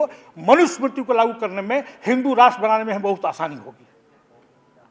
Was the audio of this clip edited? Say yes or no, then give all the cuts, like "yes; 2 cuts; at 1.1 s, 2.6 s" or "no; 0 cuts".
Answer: no; 0 cuts